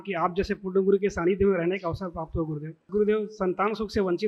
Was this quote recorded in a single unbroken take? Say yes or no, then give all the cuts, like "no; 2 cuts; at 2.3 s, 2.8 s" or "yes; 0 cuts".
no; 1 cut; at 2.8 s